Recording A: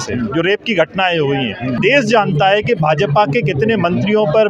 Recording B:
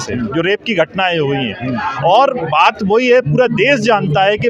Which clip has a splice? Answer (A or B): A